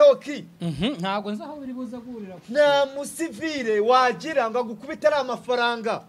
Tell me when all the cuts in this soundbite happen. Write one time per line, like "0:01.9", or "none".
none